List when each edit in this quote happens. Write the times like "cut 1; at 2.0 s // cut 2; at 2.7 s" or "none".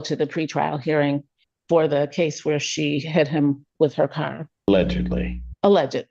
cut 1; at 4.7 s